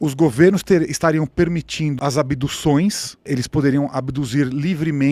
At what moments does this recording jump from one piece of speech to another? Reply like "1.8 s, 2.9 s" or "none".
1.9 s, 3.3 s